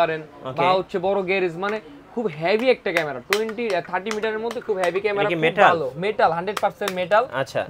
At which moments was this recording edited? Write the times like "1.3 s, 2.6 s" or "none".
none